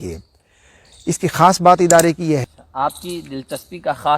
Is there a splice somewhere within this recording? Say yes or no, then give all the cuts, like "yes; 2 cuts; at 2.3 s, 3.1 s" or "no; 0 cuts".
yes; 1 cut; at 2.4 s